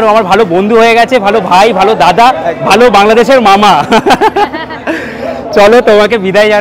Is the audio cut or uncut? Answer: uncut